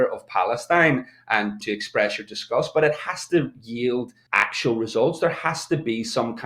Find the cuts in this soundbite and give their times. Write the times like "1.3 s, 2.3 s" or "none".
1.6 s, 4.2 s